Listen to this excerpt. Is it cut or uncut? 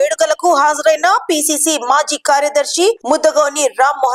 uncut